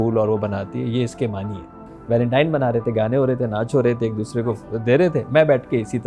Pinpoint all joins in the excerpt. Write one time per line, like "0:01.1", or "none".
0:01.9